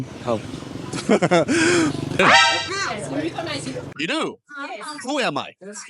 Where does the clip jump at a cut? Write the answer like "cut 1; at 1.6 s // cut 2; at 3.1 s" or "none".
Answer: cut 1; at 2.2 s